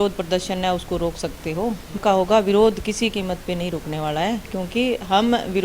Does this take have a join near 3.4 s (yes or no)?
no